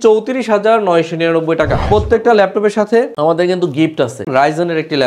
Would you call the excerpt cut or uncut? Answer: cut